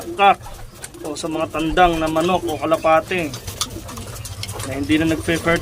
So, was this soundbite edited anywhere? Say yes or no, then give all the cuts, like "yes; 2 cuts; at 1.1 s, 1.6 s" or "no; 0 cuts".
no; 0 cuts